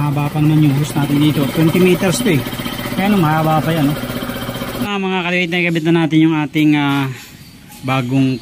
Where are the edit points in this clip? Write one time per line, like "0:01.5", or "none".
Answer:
0:04.9

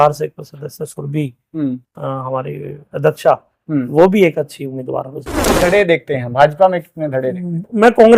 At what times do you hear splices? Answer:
0:05.7

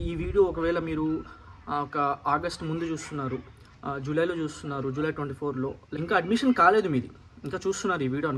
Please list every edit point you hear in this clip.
0:05.9

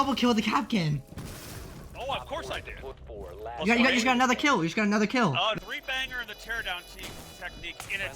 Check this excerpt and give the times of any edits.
0:03.0
0:05.6

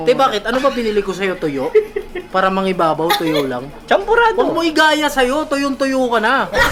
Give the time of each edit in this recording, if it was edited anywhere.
none

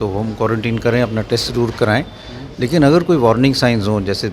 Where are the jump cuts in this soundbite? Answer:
none

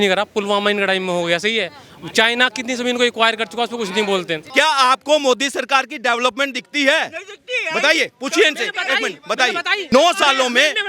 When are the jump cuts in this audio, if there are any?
0:04.4
0:09.8

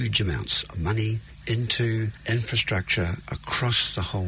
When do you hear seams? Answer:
0:01.3
0:02.2

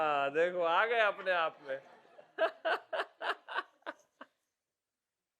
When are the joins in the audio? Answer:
none

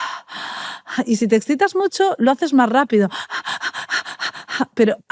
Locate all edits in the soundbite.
none

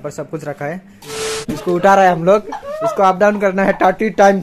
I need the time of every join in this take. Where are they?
0:01.1

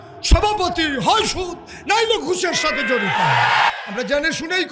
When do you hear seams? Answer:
0:03.7

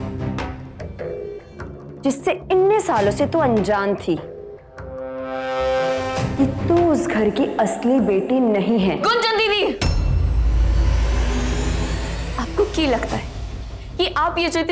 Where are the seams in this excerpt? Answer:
none

